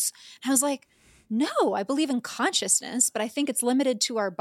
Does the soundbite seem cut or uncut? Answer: uncut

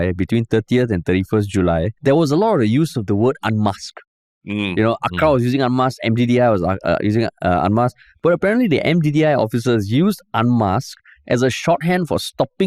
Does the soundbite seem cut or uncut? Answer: cut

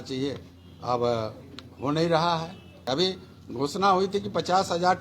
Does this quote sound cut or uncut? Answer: cut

